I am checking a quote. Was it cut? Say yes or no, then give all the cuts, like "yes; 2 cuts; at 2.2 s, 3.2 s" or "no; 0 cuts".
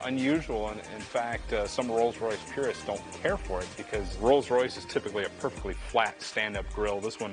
no; 0 cuts